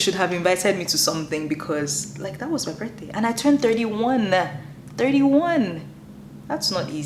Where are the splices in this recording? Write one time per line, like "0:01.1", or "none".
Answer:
none